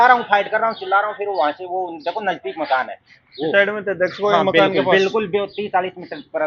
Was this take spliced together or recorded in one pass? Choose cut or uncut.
uncut